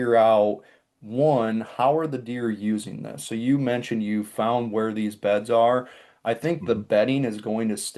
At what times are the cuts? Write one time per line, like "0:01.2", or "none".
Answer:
none